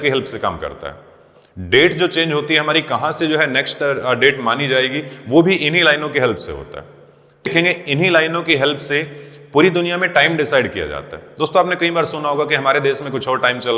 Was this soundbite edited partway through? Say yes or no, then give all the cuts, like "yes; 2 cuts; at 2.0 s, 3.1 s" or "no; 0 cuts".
yes; 1 cut; at 7.5 s